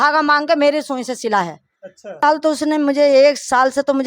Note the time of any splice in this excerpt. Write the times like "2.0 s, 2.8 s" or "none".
2.2 s